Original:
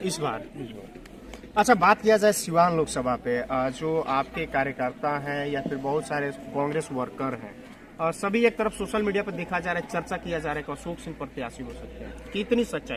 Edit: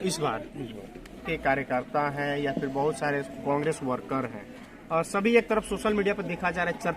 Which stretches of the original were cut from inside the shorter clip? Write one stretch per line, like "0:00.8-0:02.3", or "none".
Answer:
0:01.3-0:04.3